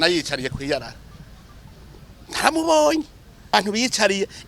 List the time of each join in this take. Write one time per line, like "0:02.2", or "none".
0:03.5